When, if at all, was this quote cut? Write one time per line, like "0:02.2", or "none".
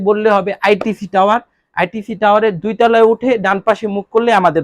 none